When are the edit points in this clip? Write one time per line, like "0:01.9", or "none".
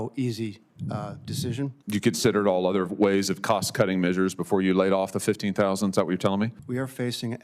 0:01.8
0:06.6

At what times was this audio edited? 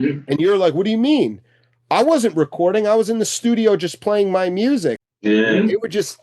0:05.1

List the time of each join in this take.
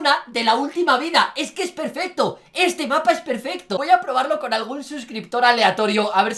none

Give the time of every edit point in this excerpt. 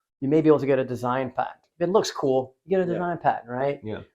0:01.6

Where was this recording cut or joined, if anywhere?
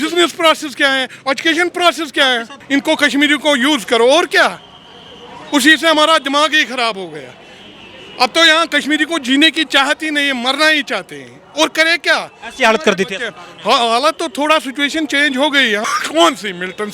0:02.5
0:15.8

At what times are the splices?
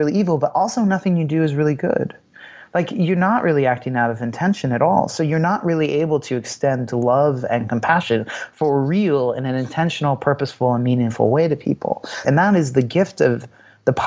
0:12.2

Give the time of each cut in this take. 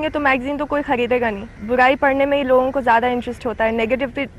0:01.5

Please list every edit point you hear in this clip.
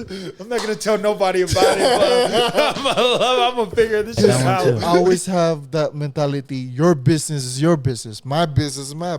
0:04.9

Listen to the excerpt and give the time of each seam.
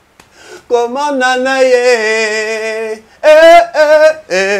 none

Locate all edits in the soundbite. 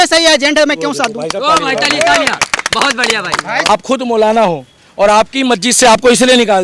0:03.7

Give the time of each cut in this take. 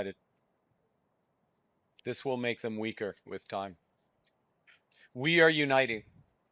none

